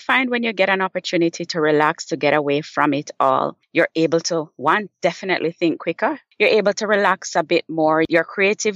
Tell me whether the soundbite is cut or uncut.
cut